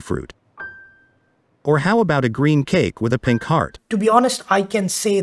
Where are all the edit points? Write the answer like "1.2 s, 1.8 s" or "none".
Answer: 3.8 s